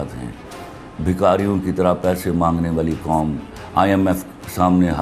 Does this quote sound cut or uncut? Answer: uncut